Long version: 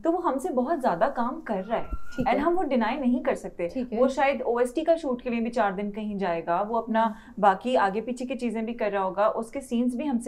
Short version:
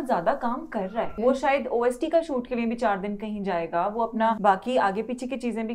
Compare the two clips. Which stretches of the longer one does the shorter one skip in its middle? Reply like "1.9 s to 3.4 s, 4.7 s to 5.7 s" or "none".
1.9 s to 3.9 s, 7.1 s to 7.4 s